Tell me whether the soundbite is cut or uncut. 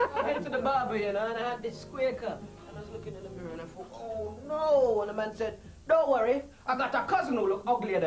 cut